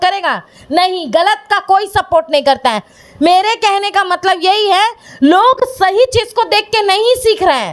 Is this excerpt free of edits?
yes; 0 cuts

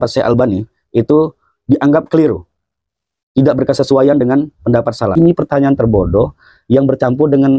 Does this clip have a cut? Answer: yes; 1 cut; at 5.1 s

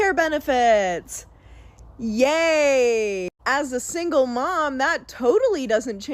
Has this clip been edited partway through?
no; 0 cuts

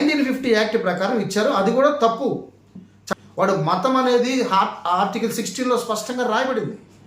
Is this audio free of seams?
no; 1 cut; at 3.0 s

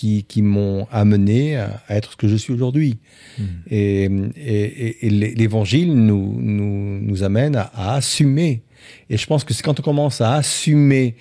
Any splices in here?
no; 0 cuts

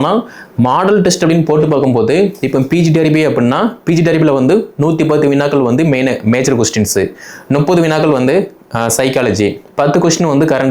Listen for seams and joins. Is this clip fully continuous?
yes; 0 cuts

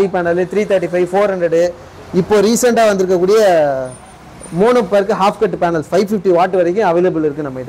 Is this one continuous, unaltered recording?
yes; 0 cuts

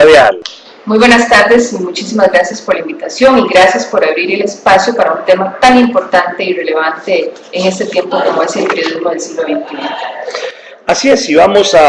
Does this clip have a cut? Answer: no; 0 cuts

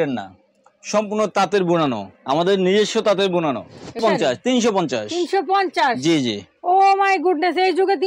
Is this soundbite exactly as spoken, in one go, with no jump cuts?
no; 1 cut; at 4.0 s

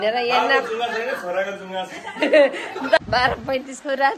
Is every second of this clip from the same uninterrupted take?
no; 1 cut; at 3.0 s

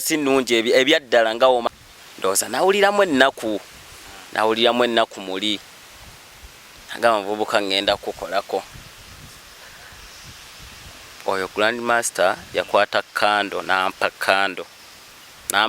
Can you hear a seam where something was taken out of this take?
yes; 1 cut; at 1.7 s

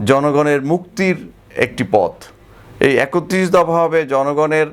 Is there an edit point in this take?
no; 0 cuts

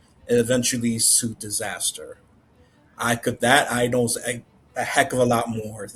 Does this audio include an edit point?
no; 0 cuts

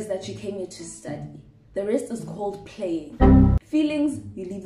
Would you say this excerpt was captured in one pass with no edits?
no; 2 cuts; at 3.1 s, 3.6 s

